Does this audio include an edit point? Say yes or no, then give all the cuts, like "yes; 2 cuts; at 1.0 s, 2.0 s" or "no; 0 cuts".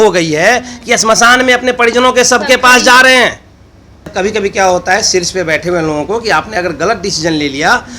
yes; 1 cut; at 4.1 s